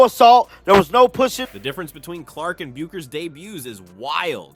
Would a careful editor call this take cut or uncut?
uncut